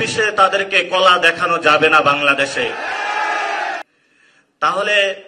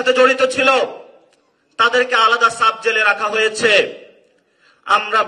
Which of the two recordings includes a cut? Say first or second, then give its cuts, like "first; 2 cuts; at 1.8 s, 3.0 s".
first; 1 cut; at 3.9 s